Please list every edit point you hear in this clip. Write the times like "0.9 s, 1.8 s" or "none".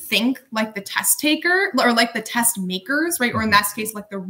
none